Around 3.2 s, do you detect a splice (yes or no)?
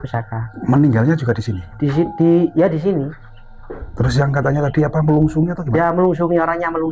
no